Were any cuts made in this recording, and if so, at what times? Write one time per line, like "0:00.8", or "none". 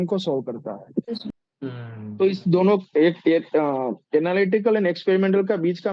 0:01.2